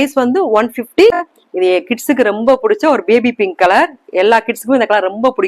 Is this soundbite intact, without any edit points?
no; 1 cut; at 1.3 s

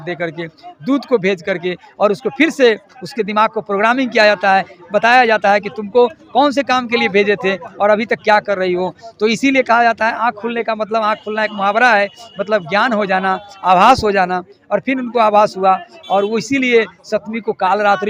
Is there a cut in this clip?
no; 0 cuts

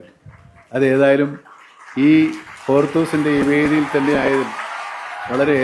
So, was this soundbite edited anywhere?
no; 0 cuts

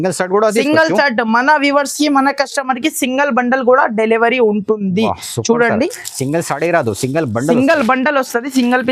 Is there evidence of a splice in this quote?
no; 0 cuts

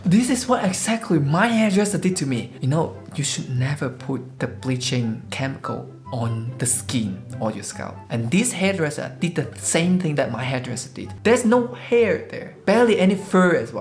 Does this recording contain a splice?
yes; 1 cut; at 11.1 s

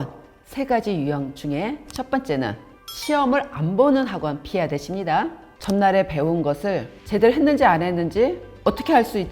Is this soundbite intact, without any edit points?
no; 3 cuts; at 5.5 s, 6.9 s, 8.5 s

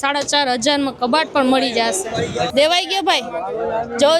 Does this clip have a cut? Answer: yes; 1 cut; at 2.5 s

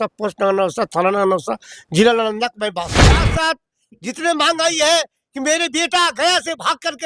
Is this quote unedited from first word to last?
no; 1 cut; at 3.3 s

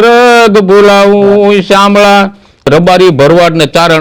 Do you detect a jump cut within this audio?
yes; 1 cut; at 2.7 s

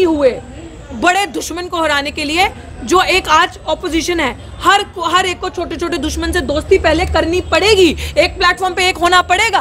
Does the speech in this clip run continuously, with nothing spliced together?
yes; 0 cuts

